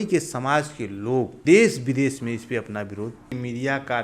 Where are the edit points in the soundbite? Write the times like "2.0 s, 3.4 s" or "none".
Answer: 1.3 s, 3.3 s